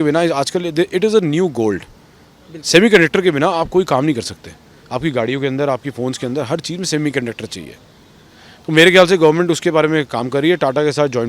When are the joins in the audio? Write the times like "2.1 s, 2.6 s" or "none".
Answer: none